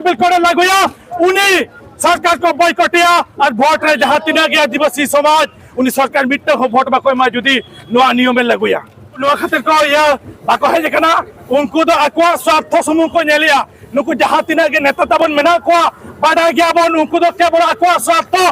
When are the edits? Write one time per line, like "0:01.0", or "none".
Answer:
0:09.2

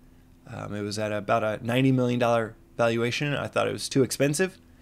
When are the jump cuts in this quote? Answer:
0:03.8

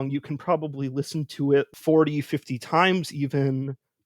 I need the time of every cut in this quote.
0:01.7

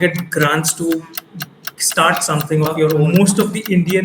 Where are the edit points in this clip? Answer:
0:03.0

